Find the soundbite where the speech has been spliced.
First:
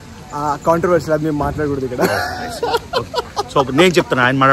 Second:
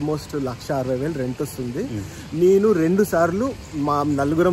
first; 1 cut; at 1.9 s

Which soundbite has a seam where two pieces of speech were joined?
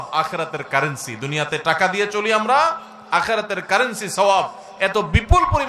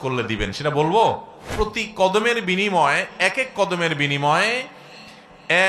second; 1 cut; at 1.4 s

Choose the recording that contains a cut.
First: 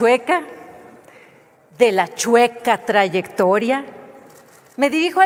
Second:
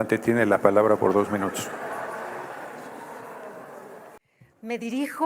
second; 1 cut; at 4.2 s

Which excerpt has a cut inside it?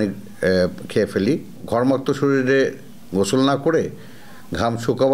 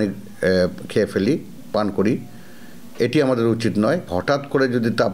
first; 1 cut; at 1.6 s

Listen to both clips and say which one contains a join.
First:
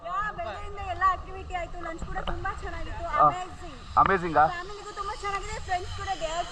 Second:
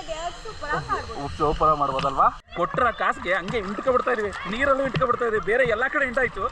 second; 1 cut; at 2.4 s

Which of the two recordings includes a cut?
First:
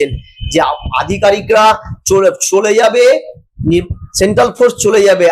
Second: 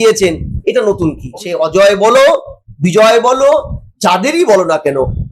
second; 1 cut; at 1.2 s

